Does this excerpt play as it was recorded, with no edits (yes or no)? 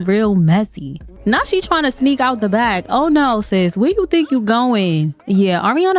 no